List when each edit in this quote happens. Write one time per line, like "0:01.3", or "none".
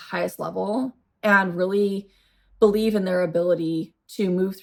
none